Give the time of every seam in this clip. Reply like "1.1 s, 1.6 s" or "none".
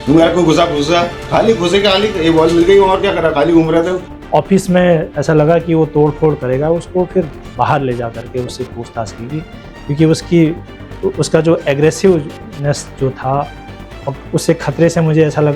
none